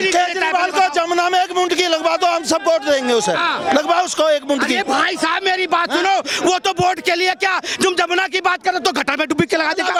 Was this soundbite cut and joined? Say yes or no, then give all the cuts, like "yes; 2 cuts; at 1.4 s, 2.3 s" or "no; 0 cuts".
no; 0 cuts